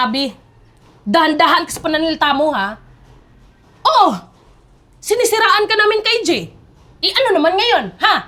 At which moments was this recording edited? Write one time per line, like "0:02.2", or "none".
none